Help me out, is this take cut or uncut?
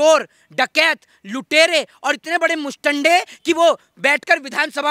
uncut